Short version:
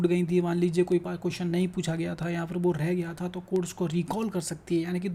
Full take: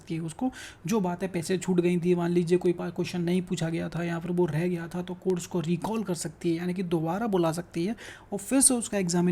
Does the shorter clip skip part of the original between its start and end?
no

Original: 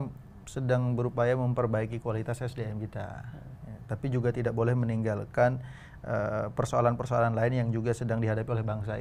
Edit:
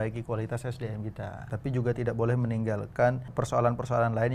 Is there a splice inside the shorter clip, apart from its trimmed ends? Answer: yes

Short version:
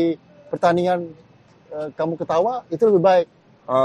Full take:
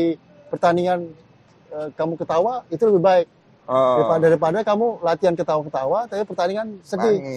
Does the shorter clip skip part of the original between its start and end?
no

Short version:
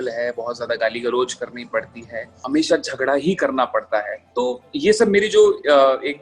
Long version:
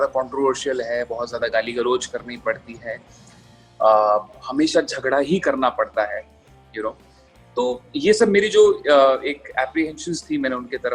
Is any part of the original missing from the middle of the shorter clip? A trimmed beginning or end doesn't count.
yes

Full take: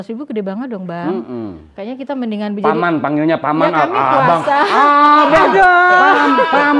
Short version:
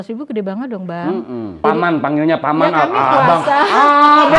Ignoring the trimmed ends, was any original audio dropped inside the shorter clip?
yes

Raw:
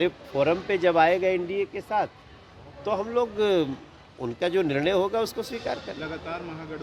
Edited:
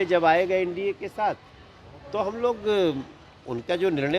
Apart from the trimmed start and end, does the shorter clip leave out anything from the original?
no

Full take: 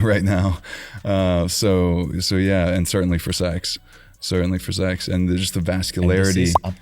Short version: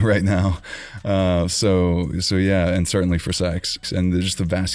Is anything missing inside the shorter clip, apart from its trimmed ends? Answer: yes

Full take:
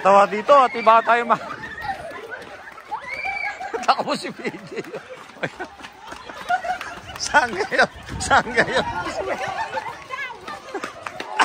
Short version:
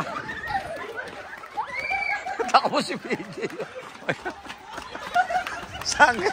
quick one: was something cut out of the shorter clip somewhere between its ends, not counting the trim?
no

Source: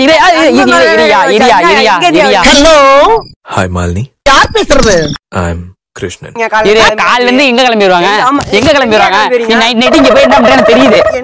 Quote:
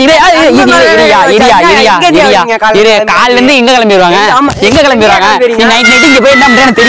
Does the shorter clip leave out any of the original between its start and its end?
yes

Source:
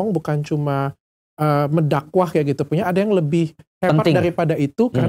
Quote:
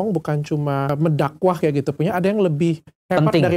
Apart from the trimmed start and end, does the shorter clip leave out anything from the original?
yes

